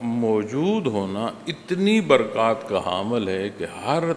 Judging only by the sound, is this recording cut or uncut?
uncut